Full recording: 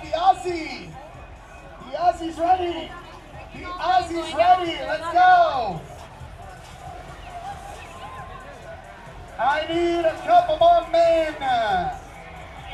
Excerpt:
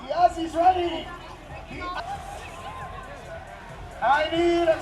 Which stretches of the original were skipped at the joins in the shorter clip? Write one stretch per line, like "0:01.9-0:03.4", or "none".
0:03.8-0:07.4

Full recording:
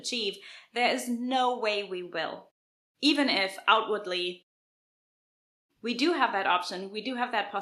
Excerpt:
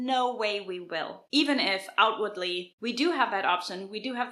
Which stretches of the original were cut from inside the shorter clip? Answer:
0:02.4-0:02.9
0:04.4-0:05.7

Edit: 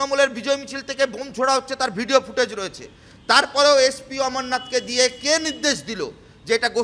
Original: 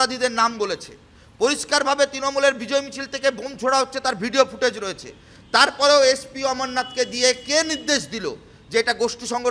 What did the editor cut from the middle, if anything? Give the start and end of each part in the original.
none

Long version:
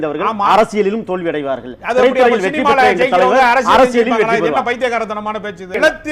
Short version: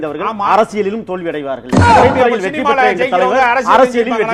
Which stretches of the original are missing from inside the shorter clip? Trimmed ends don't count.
none

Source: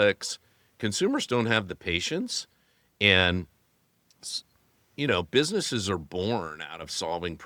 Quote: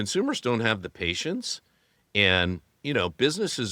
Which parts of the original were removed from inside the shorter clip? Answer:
0:03.6-0:04.8

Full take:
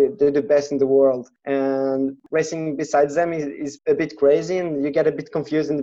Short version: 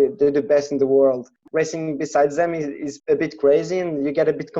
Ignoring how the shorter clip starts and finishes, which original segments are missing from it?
0:01.4-0:02.2

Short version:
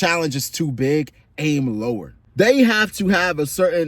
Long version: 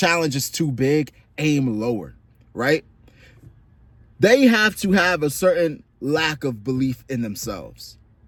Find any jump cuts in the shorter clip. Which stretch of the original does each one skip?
0:02.2-0:04.0

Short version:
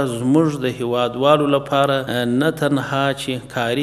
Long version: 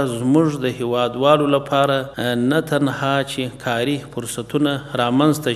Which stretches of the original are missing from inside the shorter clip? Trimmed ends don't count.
0:02.1-0:02.2

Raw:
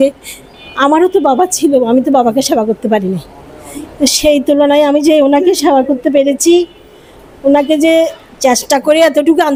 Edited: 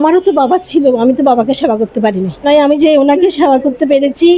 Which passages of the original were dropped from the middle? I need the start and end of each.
0:03.3-0:04.7

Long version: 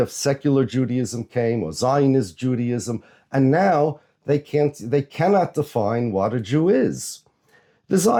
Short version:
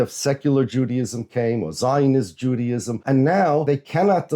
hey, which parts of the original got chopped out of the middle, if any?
0:02.9-0:03.2
0:03.9-0:04.9

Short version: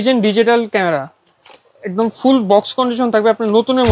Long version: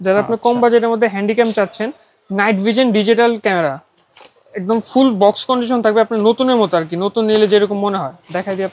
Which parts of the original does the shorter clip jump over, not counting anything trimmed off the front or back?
none

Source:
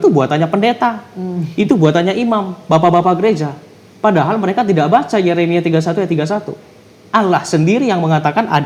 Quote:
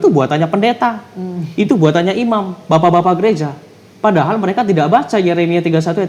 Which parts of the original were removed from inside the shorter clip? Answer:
none

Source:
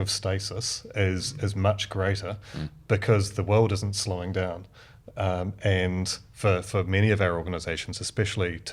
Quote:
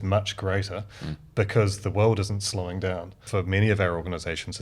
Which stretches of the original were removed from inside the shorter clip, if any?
0:04.8-0:06.7

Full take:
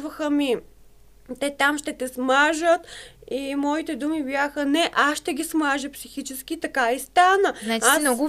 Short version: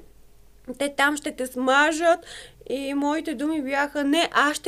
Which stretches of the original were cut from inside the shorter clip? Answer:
none

